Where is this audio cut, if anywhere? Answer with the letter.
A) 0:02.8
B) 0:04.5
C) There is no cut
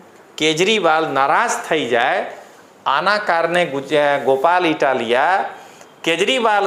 C